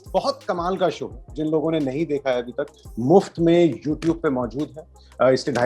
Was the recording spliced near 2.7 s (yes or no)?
no